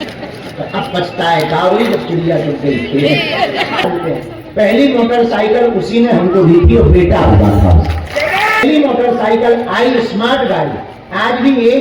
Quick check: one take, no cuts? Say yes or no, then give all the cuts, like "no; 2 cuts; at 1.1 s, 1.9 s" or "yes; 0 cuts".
no; 2 cuts; at 3.9 s, 8.6 s